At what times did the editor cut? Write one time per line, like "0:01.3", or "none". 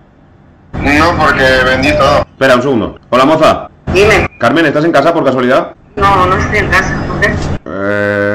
0:03.0
0:03.7
0:05.8